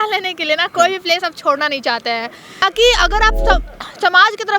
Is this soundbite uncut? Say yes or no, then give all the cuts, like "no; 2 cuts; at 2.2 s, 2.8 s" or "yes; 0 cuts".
no; 1 cut; at 2.6 s